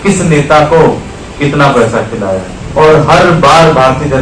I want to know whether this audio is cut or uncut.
cut